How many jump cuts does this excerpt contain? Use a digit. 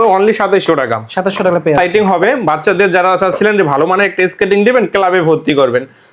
1